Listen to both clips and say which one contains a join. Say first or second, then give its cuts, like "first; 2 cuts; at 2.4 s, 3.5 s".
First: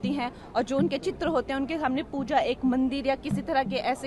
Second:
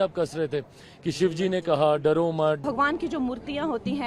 second; 1 cut; at 2.6 s